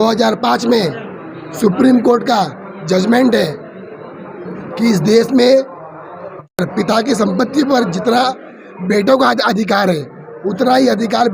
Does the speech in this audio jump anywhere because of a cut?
yes; 1 cut; at 6.5 s

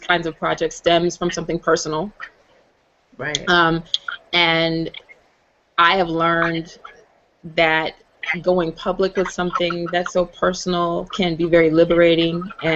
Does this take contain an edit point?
yes; 1 cut; at 10.1 s

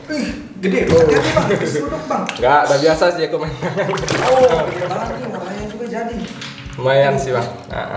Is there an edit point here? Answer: no; 0 cuts

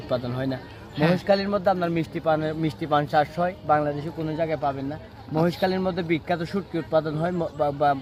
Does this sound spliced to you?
no; 0 cuts

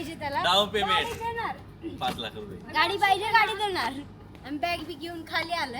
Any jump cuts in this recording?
yes; 1 cut; at 4.3 s

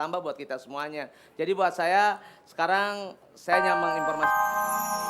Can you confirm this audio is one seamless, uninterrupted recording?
no; 1 cut; at 3.6 s

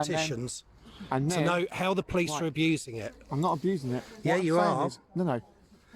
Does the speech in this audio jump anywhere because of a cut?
yes; 1 cut; at 3.8 s

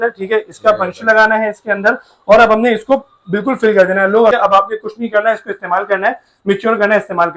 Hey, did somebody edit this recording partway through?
yes; 1 cut; at 4.3 s

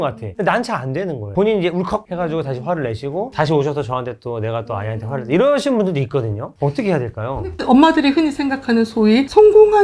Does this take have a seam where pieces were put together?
yes; 2 cuts; at 1.3 s, 7.6 s

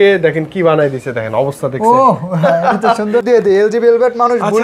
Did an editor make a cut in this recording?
yes; 1 cut; at 3.2 s

